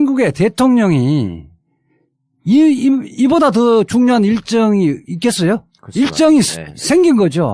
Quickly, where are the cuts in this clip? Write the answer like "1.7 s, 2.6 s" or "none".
6.1 s